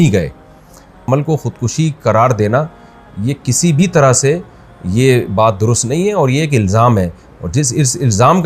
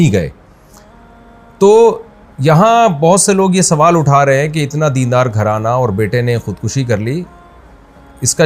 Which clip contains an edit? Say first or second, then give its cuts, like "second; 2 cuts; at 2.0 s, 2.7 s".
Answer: first; 1 cut; at 1.0 s